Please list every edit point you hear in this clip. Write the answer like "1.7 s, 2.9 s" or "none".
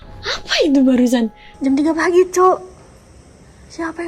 1.4 s